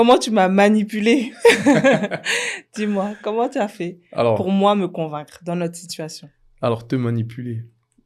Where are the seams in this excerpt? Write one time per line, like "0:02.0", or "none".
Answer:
none

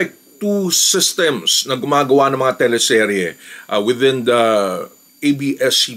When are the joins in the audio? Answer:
none

